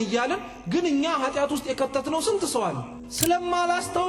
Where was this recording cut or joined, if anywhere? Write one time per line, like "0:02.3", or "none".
0:02.9